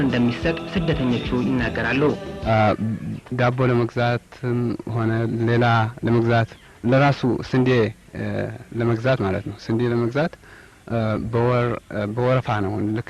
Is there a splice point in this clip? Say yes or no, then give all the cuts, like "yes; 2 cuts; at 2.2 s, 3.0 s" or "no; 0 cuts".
no; 0 cuts